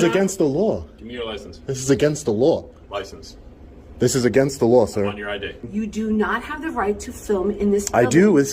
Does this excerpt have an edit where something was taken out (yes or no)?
yes